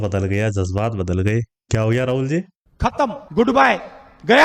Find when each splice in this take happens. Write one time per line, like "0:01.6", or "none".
0:03.2